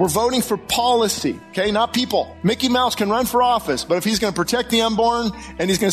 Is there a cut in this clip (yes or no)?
yes